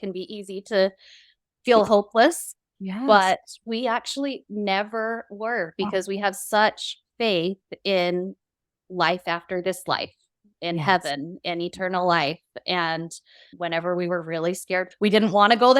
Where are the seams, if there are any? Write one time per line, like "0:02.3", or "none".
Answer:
0:14.9